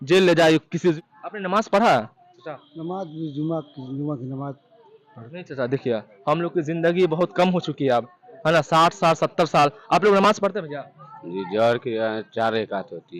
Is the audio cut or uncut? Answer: cut